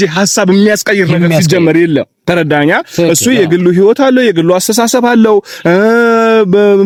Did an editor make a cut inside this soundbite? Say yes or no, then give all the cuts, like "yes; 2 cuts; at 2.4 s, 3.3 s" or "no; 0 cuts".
no; 0 cuts